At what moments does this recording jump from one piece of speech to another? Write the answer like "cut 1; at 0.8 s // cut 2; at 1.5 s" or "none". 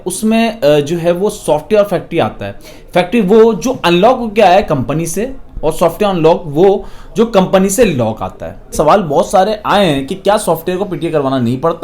cut 1; at 8.7 s